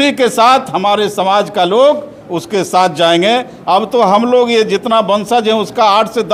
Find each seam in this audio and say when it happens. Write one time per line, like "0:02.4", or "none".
none